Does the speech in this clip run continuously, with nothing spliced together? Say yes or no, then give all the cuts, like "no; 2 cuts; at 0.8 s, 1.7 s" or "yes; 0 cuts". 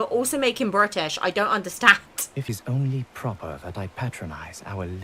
no; 1 cut; at 2.5 s